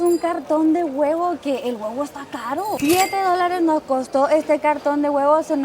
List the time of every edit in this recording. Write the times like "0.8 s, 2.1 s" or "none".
2.8 s